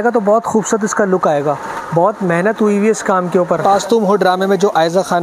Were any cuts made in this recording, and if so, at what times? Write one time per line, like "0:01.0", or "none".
0:03.6